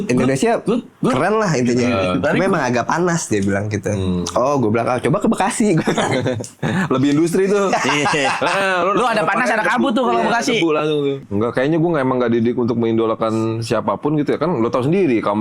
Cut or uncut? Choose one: cut